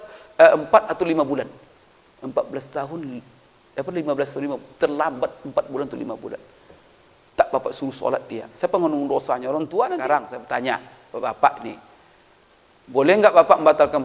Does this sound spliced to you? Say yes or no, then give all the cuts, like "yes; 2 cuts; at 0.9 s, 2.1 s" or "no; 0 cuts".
yes; 1 cut; at 10.0 s